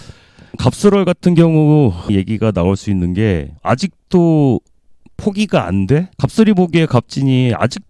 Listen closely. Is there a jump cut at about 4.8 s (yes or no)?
no